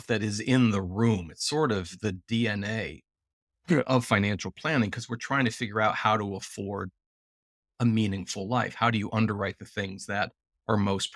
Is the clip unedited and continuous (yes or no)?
yes